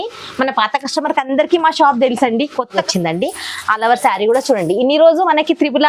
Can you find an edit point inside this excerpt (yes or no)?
yes